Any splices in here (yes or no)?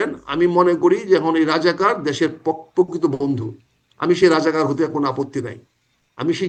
no